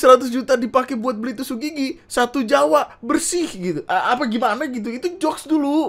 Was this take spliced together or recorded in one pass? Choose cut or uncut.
uncut